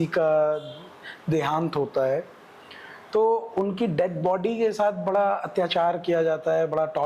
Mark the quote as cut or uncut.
uncut